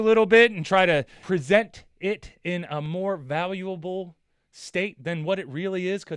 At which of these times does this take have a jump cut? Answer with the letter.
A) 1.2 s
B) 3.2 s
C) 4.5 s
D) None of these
A